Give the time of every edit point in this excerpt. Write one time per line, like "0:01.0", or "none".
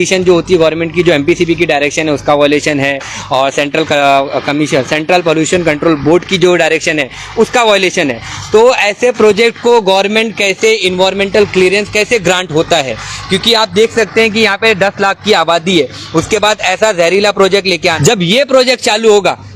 0:18.0